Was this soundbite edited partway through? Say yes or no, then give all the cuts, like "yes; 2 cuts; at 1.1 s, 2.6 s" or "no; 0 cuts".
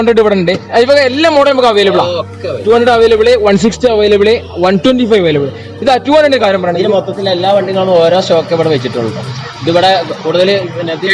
no; 0 cuts